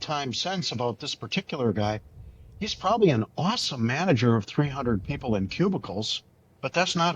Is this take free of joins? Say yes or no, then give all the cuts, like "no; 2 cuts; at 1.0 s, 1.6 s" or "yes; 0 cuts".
yes; 0 cuts